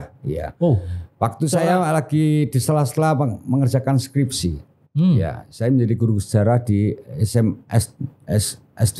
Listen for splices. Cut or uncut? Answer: uncut